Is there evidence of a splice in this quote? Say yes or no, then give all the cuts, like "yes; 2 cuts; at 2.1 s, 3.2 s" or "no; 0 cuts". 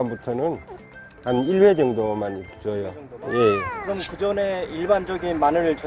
no; 0 cuts